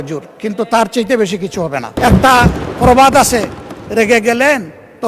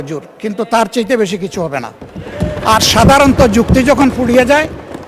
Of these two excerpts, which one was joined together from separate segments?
first; 1 cut; at 1.9 s

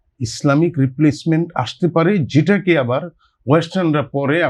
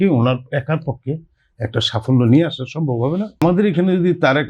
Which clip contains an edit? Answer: second; 1 cut; at 3.4 s

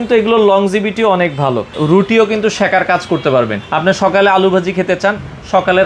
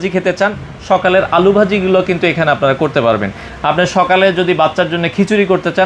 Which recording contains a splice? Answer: first; 2 cuts; at 1.8 s, 3.6 s

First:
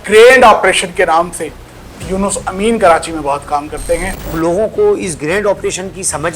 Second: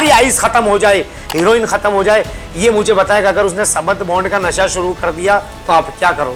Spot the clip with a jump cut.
first; 1 cut; at 4.3 s

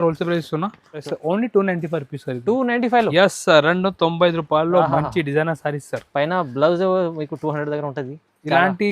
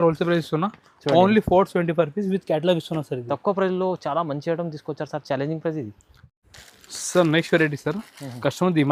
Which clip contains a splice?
first; 1 cut; at 1.0 s

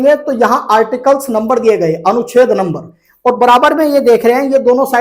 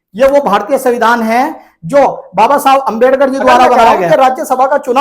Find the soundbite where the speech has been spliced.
second; 1 cut; at 3.8 s

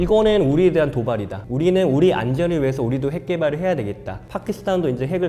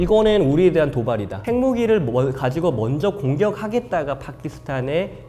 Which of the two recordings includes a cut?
second; 1 cut; at 1.4 s

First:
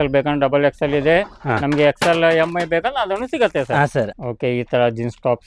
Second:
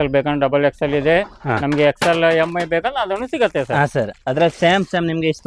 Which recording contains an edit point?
first; 1 cut; at 4.2 s

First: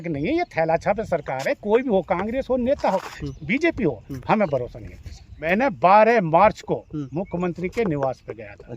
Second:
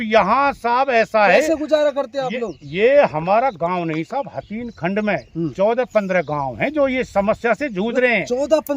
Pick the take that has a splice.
first; 1 cut; at 5.4 s

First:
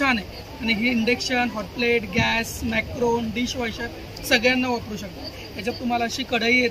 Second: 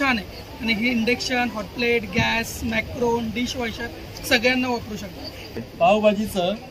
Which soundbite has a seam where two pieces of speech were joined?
second; 1 cut; at 5.5 s

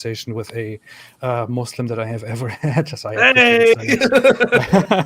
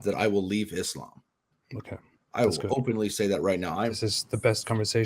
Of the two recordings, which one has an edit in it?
second; 1 cut; at 3.9 s

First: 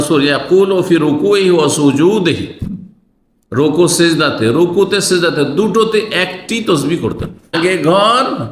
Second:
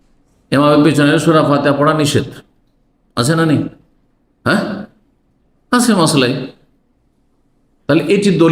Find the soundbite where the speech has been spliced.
first; 1 cut; at 7.4 s

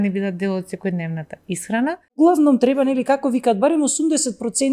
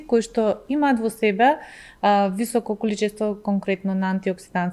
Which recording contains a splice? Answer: first; 1 cut; at 2.2 s

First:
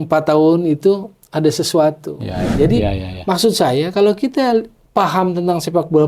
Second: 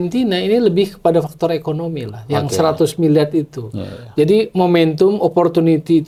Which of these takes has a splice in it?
first; 1 cut; at 2.5 s

